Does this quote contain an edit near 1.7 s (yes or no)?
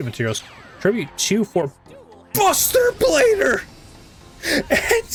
no